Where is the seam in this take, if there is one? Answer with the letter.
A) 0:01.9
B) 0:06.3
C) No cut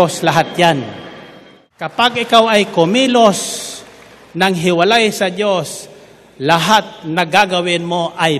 A